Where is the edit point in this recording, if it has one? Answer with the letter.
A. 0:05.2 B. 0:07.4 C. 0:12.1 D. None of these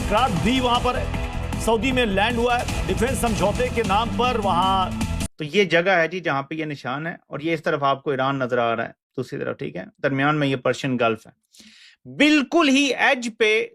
A